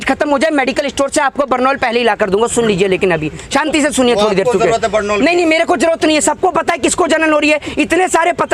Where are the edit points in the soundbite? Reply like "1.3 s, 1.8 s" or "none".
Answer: none